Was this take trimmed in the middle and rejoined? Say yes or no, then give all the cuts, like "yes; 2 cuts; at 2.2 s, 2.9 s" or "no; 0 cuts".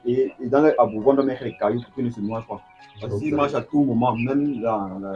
yes; 1 cut; at 3.2 s